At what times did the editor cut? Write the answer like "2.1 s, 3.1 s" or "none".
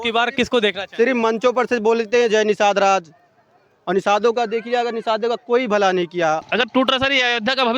6.4 s